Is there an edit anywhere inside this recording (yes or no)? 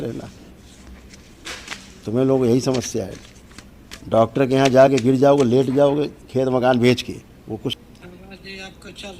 yes